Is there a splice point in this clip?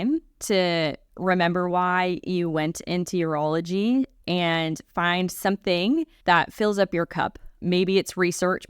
yes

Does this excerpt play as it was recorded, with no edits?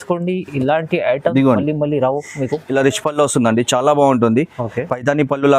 no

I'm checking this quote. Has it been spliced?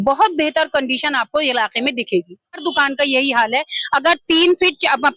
yes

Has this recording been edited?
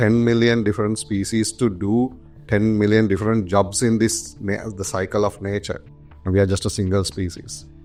no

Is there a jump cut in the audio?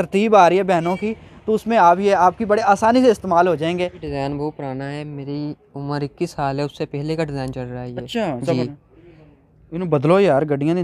yes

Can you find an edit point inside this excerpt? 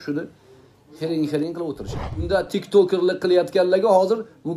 yes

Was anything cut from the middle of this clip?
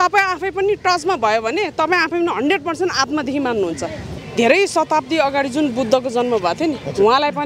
yes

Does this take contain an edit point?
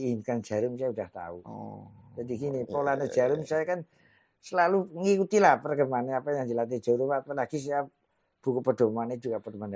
no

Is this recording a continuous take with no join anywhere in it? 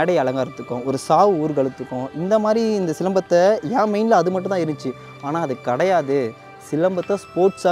yes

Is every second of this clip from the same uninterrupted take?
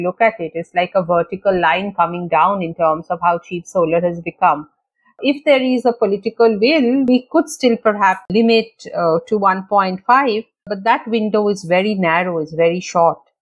no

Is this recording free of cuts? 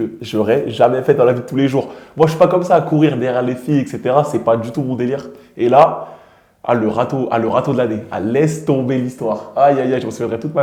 yes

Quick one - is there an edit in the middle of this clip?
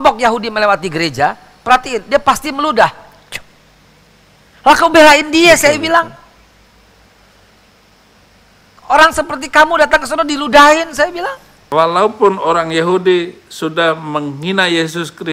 yes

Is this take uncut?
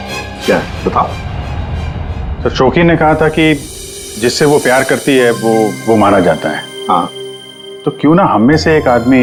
yes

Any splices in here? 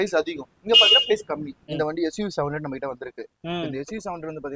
yes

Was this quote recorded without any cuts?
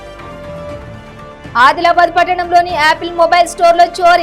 yes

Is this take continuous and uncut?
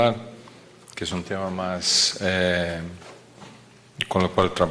yes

